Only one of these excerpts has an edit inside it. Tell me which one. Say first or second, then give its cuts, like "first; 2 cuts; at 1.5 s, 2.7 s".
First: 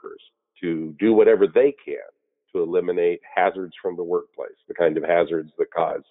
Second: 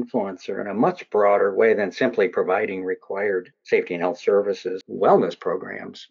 second; 2 cuts; at 3.5 s, 4.8 s